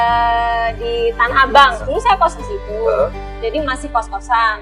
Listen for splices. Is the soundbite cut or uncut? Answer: cut